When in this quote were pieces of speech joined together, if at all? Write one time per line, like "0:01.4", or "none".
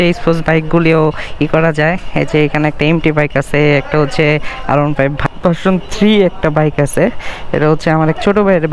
0:05.2

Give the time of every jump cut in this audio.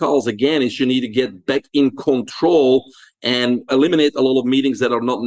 0:03.7

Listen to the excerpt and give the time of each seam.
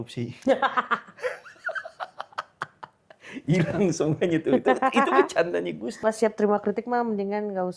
0:06.0

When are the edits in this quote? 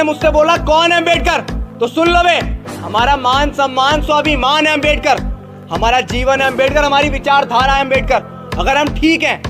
none

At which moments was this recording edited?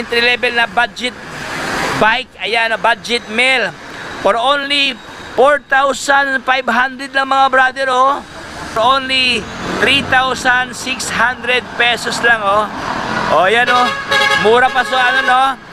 0:08.8

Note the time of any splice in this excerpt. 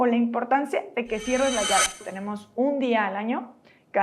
0:02.1

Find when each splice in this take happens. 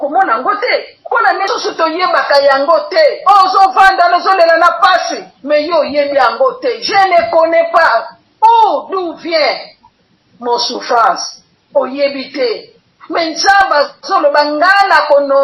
0:01.5

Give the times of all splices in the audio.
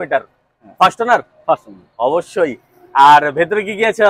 none

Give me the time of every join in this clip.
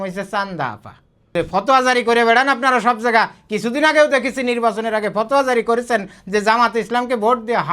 0:01.3

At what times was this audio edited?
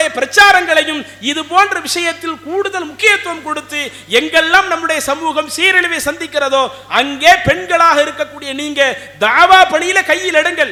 none

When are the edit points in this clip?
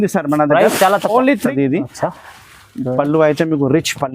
0:01.5

